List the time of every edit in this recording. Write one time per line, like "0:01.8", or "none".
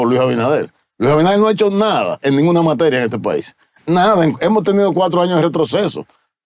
none